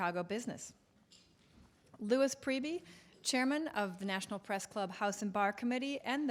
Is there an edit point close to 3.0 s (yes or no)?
no